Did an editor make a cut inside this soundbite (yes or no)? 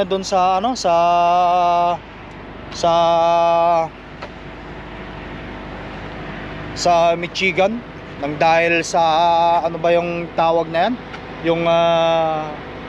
no